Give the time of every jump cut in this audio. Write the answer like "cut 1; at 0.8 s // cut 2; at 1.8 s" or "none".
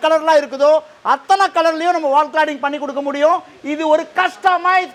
none